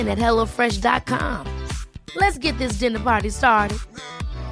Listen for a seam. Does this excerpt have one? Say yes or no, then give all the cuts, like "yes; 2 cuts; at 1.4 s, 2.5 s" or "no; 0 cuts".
no; 0 cuts